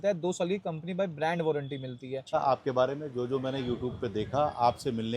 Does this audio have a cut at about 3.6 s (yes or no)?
no